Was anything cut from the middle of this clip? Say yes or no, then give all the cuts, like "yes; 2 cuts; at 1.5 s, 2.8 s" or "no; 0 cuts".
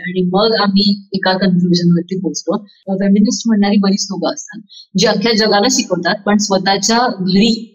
yes; 1 cut; at 2.8 s